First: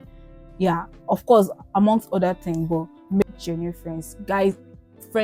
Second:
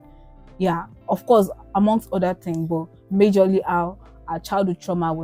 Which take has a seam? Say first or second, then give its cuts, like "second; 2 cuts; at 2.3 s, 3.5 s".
first; 1 cut; at 3.2 s